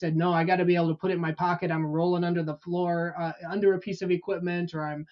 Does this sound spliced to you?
no; 0 cuts

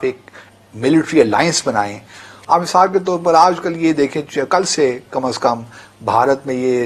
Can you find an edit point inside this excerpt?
no; 0 cuts

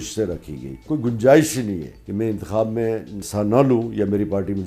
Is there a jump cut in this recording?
yes; 3 cuts; at 0.8 s, 2.0 s, 3.2 s

